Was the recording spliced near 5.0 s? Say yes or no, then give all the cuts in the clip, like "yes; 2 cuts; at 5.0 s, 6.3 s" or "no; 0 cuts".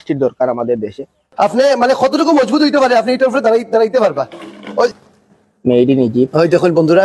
yes; 2 cuts; at 1.2 s, 5.0 s